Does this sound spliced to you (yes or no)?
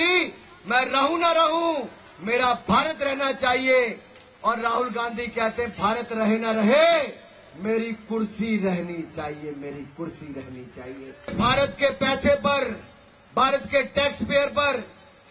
yes